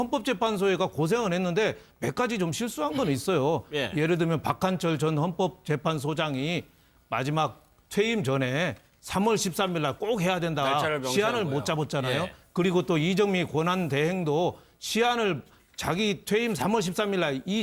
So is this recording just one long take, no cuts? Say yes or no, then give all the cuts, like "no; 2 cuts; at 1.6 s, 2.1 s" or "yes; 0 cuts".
no; 1 cut; at 7.6 s